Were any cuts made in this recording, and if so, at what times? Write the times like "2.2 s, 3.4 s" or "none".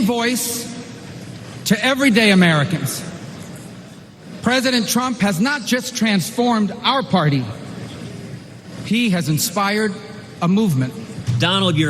10.9 s